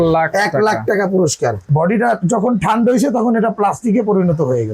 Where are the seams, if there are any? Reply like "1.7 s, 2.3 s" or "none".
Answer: 1.7 s